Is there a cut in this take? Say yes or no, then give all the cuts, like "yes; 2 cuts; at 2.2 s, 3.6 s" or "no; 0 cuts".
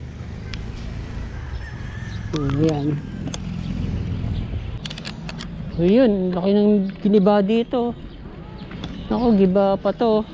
yes; 1 cut; at 4.8 s